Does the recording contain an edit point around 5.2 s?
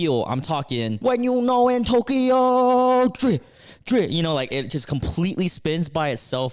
no; 1 cut; at 0.9 s

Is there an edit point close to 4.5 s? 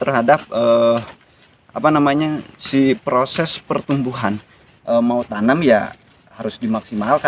yes; 1 cut; at 4.5 s

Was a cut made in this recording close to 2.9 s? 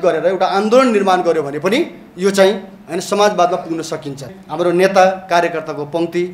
no; 1 cut; at 4.3 s

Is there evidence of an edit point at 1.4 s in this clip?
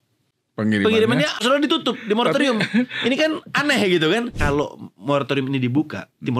yes; 2 cuts; at 1.4 s, 4.3 s

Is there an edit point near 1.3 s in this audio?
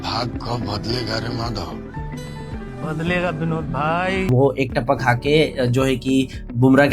no; 1 cut; at 4.3 s

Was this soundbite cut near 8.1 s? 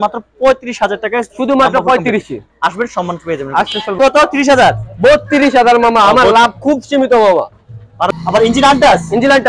yes; 2 cuts; at 4.0 s, 8.1 s

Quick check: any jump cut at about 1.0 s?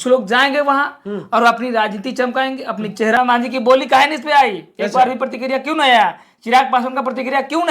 no; 1 cut; at 3.2 s

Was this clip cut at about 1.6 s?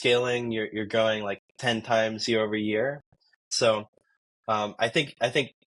no; 1 cut; at 3.5 s

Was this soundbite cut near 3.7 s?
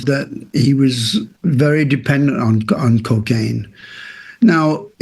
no; 1 cut; at 1.3 s

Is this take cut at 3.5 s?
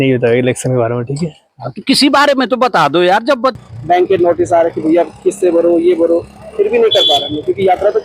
yes; 1 cut; at 3.5 s

